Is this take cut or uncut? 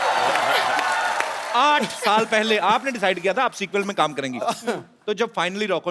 cut